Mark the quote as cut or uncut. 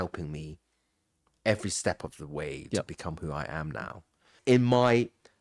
cut